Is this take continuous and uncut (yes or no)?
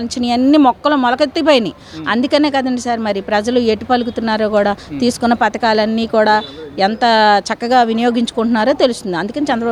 yes